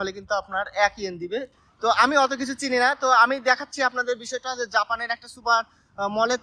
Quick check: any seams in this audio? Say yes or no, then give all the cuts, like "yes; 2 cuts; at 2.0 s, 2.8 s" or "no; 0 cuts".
yes; 1 cut; at 1.7 s